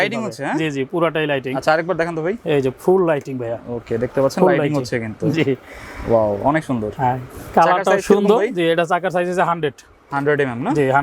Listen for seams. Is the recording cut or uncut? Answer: uncut